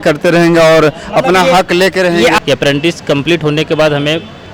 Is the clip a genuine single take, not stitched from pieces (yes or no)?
no